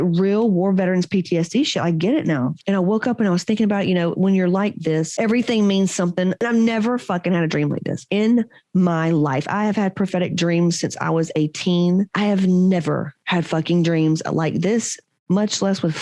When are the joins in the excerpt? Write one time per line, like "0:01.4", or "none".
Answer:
none